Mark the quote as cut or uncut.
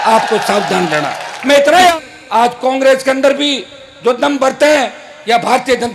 cut